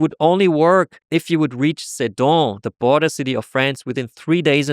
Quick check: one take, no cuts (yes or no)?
no